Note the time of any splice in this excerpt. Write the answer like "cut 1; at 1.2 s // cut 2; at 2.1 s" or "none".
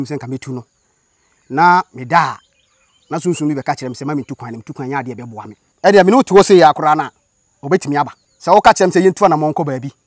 cut 1; at 5.6 s // cut 2; at 8.3 s